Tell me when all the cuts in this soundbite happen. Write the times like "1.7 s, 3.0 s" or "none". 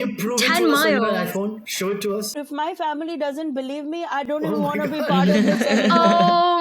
2.3 s